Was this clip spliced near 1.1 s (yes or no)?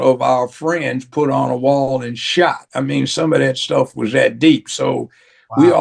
no